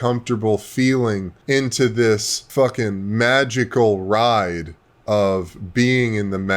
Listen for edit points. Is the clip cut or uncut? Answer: cut